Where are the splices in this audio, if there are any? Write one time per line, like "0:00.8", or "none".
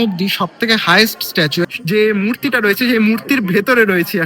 0:01.7